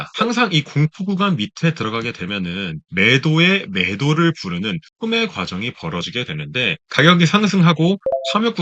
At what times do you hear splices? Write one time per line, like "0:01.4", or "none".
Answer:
0:06.8